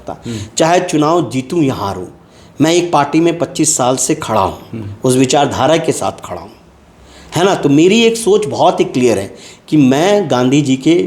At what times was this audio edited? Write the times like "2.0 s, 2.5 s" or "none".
none